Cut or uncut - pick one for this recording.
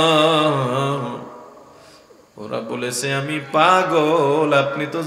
uncut